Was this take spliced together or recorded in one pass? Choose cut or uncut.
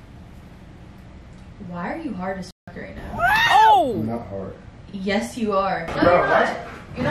cut